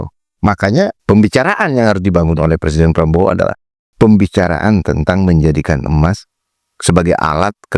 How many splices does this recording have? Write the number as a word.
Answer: one